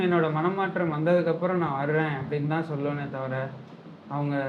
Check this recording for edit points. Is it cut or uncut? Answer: uncut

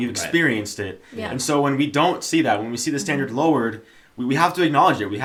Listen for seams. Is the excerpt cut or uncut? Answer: uncut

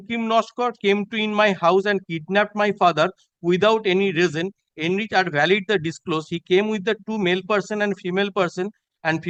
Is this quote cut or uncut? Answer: uncut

